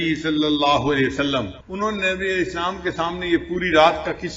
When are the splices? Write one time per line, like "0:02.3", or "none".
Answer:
0:01.6